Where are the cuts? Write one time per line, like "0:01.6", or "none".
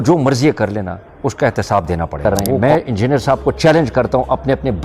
0:02.2